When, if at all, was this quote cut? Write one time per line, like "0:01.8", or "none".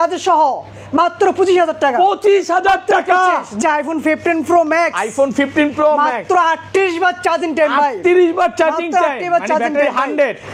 0:03.6